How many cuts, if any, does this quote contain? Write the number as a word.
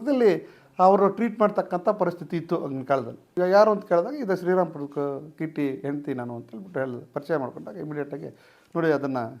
one